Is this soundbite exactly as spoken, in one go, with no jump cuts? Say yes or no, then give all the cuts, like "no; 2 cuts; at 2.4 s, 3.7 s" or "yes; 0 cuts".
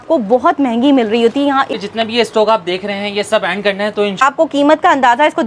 no; 2 cuts; at 1.7 s, 4.2 s